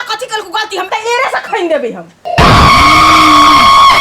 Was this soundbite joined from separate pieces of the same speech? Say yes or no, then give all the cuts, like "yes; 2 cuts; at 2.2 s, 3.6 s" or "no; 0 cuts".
yes; 1 cut; at 2.2 s